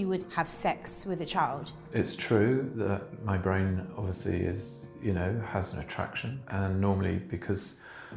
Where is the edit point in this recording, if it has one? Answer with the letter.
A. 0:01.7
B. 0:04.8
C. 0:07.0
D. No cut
D